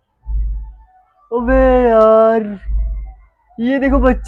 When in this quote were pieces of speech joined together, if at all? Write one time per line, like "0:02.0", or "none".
none